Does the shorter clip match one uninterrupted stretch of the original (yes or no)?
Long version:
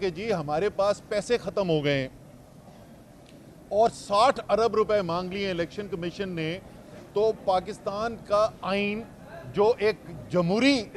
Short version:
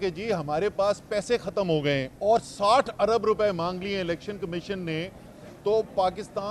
no